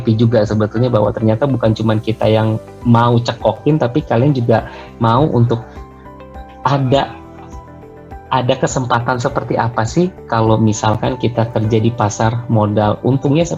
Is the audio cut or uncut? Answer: uncut